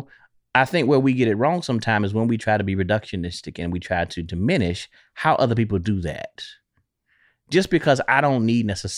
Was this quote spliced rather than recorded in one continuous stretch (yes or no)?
no